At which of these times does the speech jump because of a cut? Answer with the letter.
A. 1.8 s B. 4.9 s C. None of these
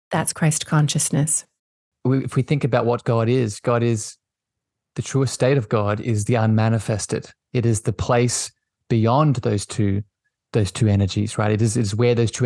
A